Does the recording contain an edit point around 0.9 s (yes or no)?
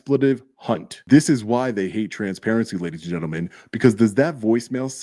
yes